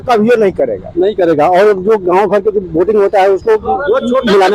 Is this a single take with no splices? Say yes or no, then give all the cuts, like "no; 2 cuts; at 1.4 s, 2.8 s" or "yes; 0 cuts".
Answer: yes; 0 cuts